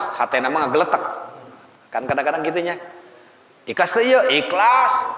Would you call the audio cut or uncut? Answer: uncut